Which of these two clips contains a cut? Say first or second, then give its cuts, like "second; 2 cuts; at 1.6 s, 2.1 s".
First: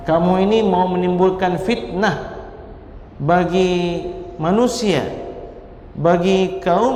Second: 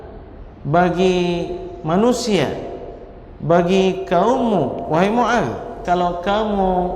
second; 1 cut; at 5.8 s